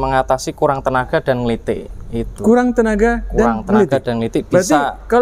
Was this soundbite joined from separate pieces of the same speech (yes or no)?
no